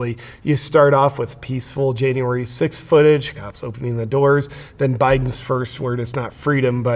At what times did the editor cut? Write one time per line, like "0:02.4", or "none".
none